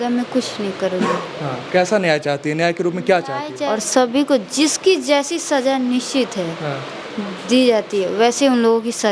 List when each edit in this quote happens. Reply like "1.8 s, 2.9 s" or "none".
3.7 s